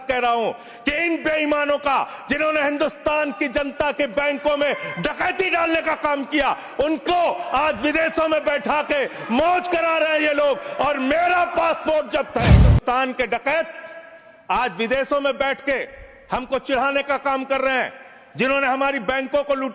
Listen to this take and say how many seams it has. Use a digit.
1